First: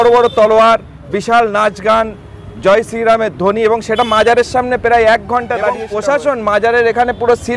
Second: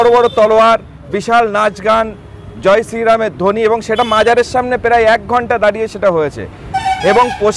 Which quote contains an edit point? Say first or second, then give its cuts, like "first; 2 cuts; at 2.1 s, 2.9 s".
first; 1 cut; at 5.9 s